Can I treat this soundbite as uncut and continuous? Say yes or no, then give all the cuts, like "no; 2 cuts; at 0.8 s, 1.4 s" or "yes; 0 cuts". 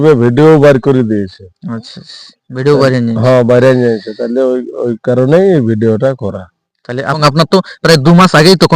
no; 1 cut; at 7.2 s